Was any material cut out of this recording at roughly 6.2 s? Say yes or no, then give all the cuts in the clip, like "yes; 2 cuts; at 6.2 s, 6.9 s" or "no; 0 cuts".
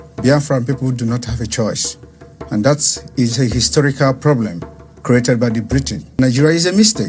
yes; 1 cut; at 6.2 s